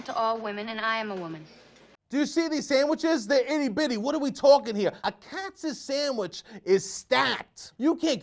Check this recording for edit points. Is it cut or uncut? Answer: uncut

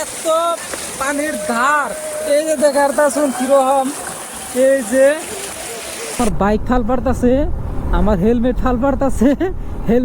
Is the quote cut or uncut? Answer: cut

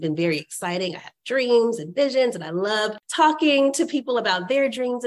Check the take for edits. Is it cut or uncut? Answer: cut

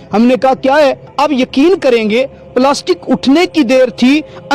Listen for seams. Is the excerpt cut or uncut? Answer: cut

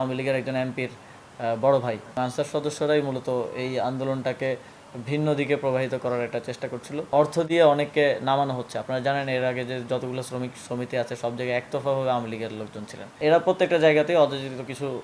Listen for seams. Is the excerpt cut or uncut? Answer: cut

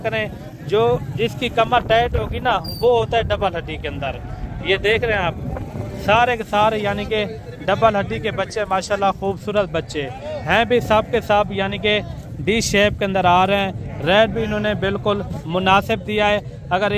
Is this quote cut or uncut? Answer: uncut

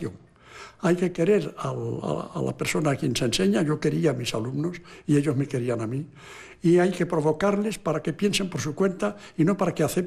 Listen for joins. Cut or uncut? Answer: uncut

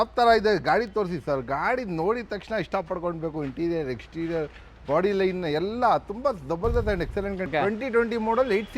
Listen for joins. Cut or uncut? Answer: cut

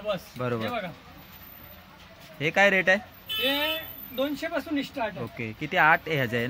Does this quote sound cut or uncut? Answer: uncut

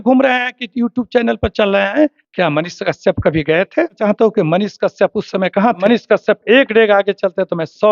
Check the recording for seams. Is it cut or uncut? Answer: cut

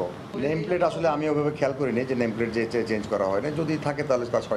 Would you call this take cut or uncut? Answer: uncut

